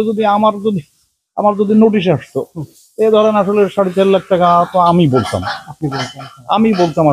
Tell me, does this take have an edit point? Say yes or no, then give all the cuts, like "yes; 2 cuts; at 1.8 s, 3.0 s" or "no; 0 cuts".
no; 0 cuts